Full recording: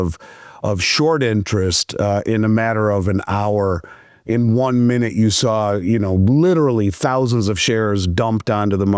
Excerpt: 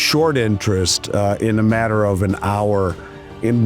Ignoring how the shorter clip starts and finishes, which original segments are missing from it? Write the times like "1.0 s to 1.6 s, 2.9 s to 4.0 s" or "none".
none